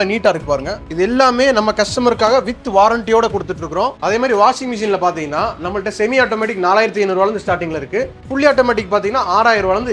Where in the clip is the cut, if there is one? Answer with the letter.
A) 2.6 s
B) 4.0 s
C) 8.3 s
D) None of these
B